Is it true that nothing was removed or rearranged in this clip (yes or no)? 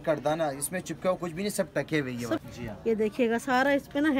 no